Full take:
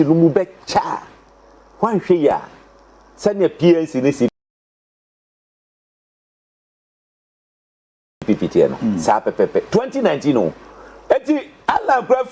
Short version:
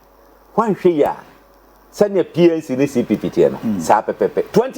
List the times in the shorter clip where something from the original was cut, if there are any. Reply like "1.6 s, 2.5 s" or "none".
3.1 s

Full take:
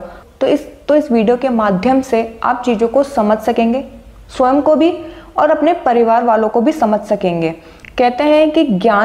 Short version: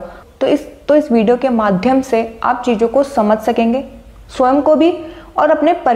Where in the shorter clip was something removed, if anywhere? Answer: none

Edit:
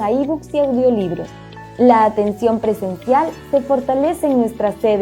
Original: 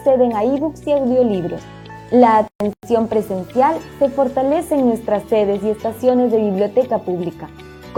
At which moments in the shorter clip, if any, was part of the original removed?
2.2 s

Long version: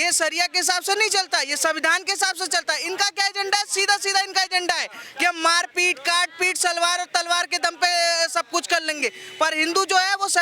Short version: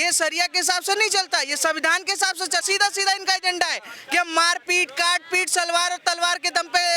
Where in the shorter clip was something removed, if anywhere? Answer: 2.6 s

